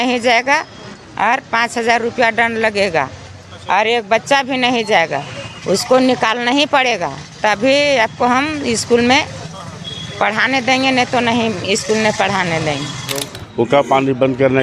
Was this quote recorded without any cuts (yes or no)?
no